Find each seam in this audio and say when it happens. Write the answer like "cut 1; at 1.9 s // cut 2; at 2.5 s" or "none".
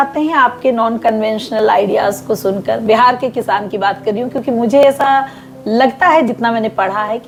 none